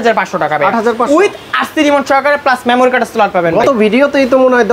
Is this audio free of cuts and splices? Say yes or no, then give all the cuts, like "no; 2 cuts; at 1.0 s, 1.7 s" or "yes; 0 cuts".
yes; 0 cuts